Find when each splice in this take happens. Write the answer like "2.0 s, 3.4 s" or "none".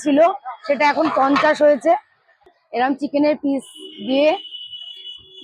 none